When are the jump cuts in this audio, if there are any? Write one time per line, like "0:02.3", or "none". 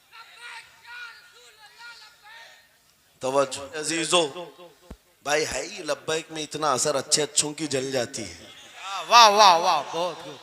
0:03.9